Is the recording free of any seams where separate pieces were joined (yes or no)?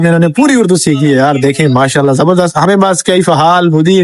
no